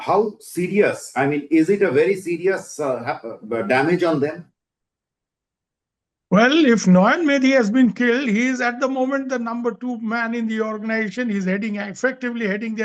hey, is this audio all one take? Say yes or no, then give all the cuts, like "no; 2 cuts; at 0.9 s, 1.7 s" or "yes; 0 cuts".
yes; 0 cuts